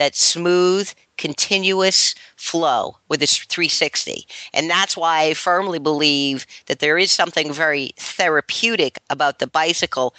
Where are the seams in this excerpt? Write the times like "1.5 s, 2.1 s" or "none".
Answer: none